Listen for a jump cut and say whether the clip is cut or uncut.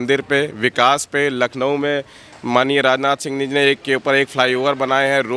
uncut